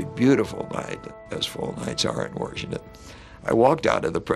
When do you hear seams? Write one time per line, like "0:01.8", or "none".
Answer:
0:01.1